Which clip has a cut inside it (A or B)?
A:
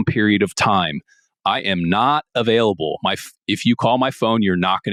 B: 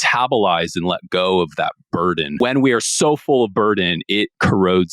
B